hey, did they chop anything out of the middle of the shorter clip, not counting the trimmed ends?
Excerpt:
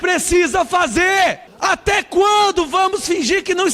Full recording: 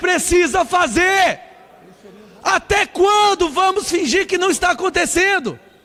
yes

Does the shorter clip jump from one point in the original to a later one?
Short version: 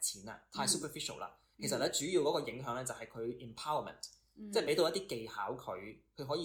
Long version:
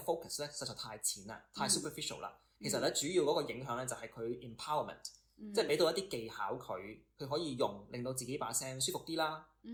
no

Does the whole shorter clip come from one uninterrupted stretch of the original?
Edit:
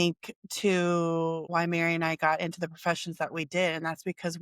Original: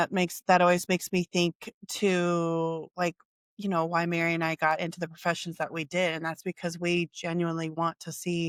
no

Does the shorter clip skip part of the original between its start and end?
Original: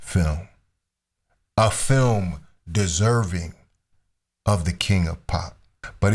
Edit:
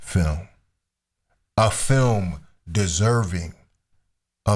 no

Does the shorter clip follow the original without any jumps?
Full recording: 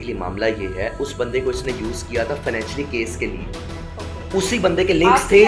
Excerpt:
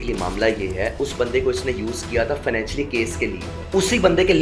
no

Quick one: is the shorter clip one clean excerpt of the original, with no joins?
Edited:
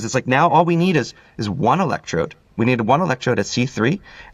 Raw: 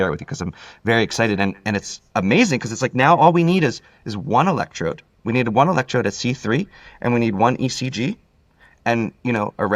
yes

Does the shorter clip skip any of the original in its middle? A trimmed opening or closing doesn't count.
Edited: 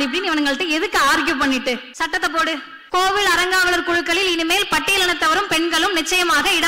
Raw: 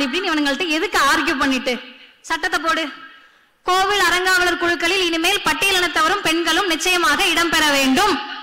yes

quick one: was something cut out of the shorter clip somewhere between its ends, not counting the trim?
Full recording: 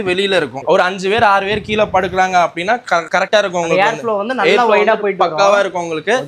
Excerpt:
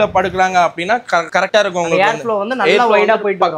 no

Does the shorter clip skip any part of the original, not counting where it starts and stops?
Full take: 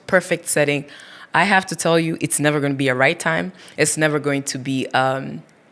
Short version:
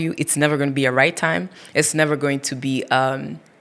no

